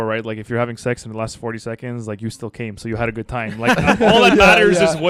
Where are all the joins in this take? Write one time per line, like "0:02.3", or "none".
none